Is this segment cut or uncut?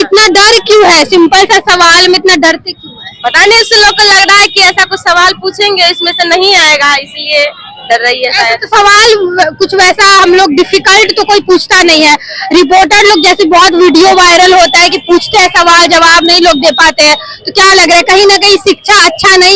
uncut